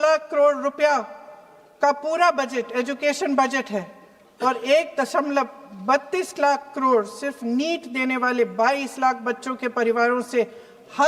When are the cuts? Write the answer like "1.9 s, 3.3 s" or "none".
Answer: none